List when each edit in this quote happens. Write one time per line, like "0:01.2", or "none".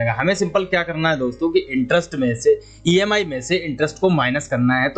none